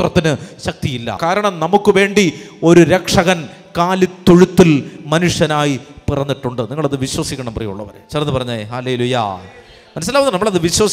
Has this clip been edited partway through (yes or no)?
yes